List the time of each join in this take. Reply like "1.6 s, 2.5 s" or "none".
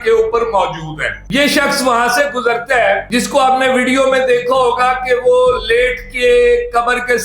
1.2 s